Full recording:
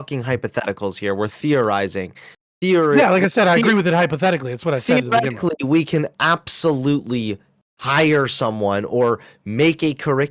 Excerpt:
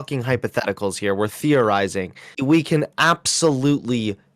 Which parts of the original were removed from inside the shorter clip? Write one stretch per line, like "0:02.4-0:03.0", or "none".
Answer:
0:02.4-0:05.6